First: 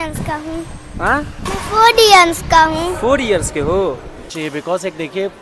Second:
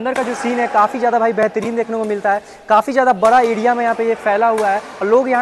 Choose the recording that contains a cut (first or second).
first